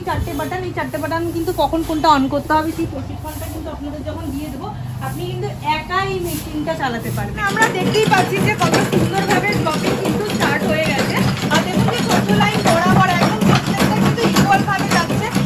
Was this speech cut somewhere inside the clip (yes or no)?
yes